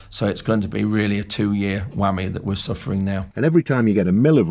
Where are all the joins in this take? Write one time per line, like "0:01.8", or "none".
0:03.3